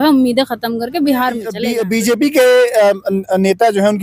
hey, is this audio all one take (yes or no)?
no